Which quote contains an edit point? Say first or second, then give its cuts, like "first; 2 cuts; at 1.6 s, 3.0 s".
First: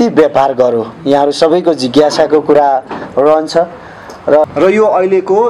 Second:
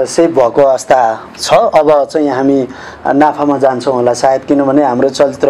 first; 1 cut; at 4.4 s